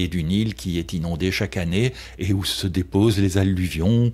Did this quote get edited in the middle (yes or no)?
no